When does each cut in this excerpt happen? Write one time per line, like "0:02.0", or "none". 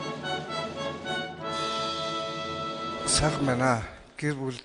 0:03.1